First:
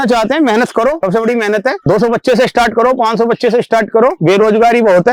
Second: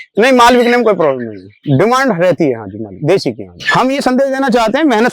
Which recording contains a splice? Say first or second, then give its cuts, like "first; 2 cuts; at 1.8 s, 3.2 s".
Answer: second; 1 cut; at 3.5 s